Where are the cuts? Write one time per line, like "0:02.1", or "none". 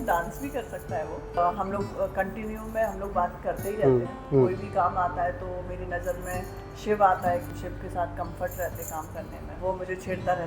0:01.4
0:04.2
0:07.5
0:09.5

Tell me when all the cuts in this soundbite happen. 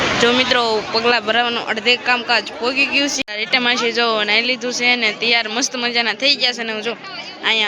0:03.2

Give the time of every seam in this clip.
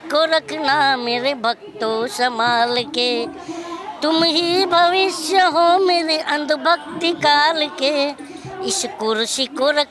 none

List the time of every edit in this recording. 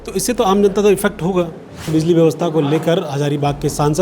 0:01.9

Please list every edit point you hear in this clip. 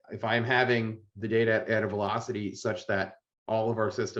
none

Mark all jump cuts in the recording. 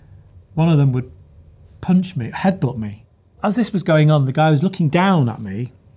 0:03.4

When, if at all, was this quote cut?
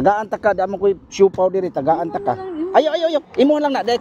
none

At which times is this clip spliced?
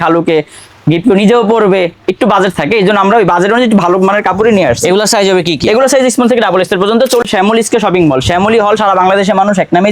0:07.2

